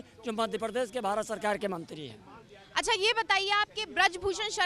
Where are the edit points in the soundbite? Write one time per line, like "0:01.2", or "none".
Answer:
none